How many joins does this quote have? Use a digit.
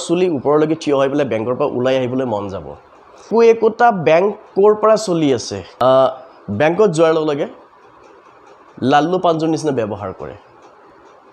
2